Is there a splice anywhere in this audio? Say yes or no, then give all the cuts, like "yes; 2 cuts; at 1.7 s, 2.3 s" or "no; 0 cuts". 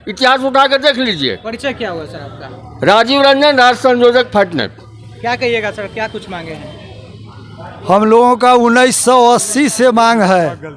no; 0 cuts